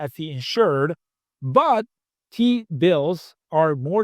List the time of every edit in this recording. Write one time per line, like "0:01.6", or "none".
0:02.0